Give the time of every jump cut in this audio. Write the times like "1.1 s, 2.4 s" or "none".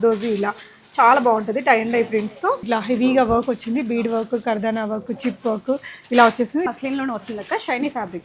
2.6 s, 6.7 s